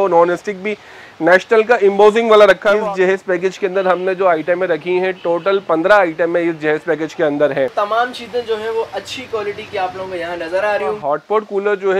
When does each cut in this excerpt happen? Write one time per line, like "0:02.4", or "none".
0:02.8
0:07.7
0:11.0